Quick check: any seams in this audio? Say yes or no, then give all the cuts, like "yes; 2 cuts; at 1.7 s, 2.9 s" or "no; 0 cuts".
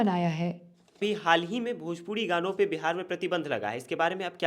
yes; 1 cut; at 1.0 s